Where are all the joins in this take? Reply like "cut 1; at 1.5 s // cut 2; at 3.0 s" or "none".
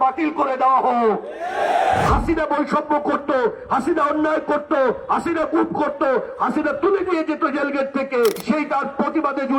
cut 1; at 2.1 s // cut 2; at 8.4 s